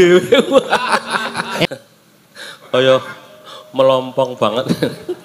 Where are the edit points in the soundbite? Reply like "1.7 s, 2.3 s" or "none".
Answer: 1.7 s